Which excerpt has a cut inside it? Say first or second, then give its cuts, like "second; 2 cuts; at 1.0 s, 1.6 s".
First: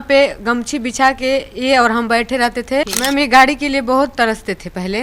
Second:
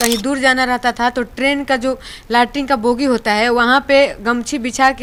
first; 1 cut; at 2.9 s